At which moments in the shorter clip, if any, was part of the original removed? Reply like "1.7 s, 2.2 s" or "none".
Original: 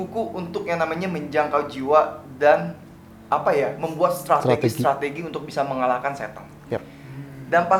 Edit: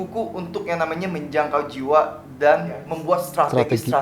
2.9 s